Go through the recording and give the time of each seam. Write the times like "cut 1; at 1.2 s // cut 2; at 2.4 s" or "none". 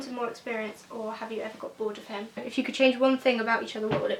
cut 1; at 2.5 s